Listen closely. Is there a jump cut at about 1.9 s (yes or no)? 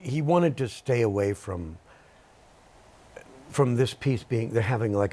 no